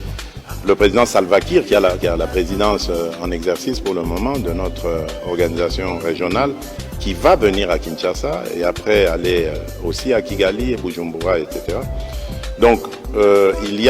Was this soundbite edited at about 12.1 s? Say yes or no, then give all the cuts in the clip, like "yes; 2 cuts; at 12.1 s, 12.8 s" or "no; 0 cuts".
yes; 1 cut; at 12.1 s